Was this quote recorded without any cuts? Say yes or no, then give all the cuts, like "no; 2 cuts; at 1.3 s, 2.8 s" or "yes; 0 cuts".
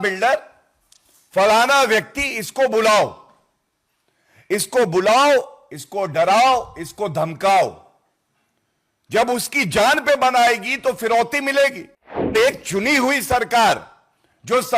no; 1 cut; at 12.3 s